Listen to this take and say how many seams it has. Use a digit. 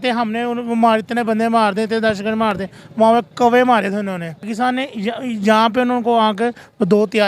1